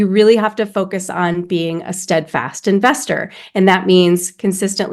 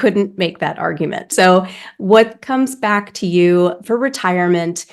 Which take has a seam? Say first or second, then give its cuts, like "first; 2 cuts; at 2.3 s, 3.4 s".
second; 2 cuts; at 1.3 s, 3.8 s